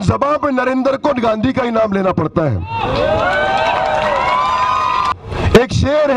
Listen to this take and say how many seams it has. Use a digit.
1